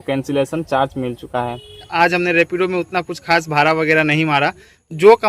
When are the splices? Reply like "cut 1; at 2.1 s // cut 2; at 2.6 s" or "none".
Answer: cut 1; at 1.9 s